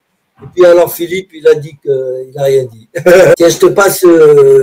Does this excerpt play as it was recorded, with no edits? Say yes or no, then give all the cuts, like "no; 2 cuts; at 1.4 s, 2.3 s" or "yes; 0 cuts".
no; 1 cut; at 3.3 s